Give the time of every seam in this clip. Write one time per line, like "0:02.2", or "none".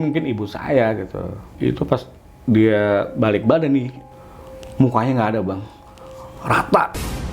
0:01.5
0:04.1